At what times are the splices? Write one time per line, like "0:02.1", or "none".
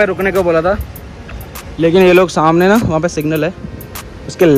none

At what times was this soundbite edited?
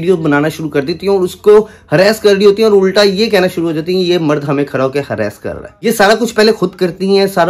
none

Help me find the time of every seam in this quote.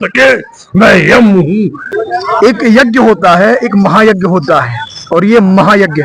0:01.9

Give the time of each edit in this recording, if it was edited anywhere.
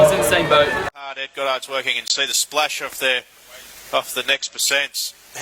0:00.9

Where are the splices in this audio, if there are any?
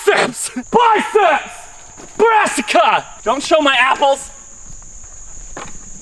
none

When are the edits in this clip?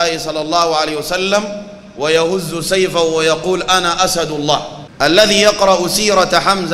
0:04.8

